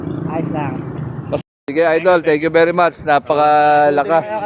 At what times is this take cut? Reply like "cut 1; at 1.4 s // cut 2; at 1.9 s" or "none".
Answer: cut 1; at 1.4 s